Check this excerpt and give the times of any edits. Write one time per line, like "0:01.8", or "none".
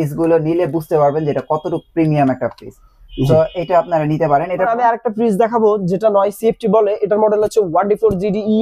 0:04.7